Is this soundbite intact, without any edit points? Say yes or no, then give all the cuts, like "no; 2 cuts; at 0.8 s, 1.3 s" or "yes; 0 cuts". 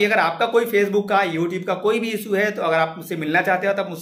yes; 0 cuts